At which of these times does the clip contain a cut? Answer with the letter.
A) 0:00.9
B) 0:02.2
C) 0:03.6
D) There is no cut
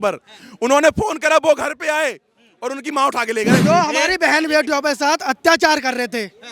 C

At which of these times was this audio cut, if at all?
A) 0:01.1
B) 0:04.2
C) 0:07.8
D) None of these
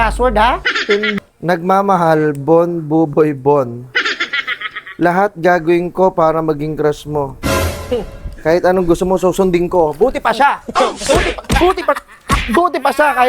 A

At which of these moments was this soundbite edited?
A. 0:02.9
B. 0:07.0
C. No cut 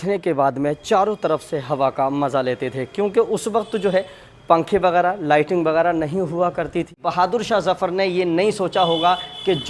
B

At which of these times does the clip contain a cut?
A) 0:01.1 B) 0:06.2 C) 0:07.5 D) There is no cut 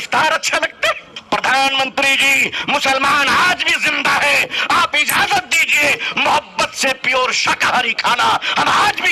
A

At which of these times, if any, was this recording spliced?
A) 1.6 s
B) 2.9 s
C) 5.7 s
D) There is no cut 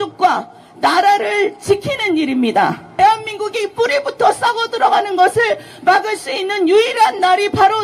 B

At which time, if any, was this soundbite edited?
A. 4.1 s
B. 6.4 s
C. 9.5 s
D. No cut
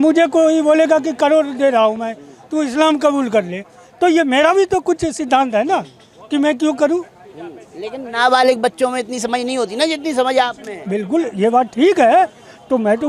D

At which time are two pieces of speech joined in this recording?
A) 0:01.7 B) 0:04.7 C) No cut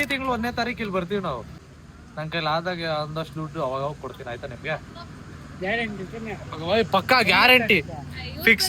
A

